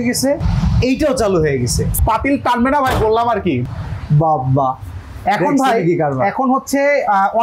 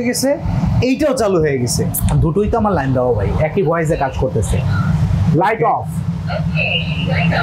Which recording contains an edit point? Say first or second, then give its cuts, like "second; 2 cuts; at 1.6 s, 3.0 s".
first; 2 cuts; at 2.0 s, 3.6 s